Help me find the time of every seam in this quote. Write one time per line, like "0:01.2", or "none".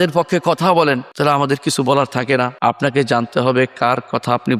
0:01.1
0:02.5